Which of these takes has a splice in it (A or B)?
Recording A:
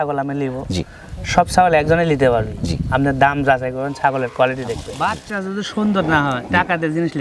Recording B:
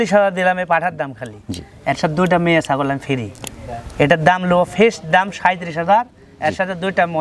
A